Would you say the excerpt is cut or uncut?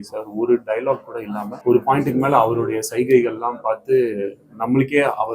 cut